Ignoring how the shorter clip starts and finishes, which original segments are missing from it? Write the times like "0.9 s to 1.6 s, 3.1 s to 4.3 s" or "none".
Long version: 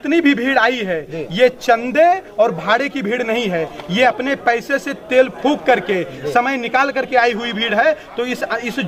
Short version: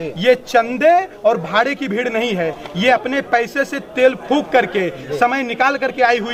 none